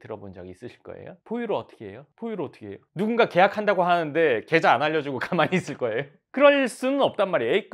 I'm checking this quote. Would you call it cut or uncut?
uncut